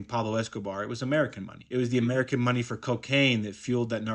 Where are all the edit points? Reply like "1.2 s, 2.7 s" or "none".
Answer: none